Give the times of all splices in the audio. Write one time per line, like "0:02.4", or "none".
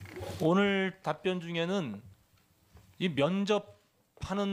0:03.1